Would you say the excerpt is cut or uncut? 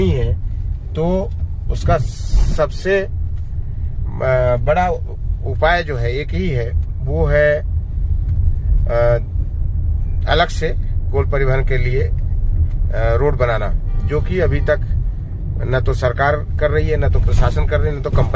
uncut